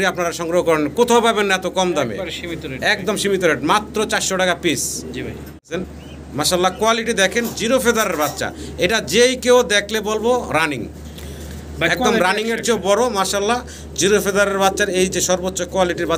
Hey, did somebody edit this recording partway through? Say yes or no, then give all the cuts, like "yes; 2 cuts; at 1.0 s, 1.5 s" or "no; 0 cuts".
yes; 1 cut; at 5.7 s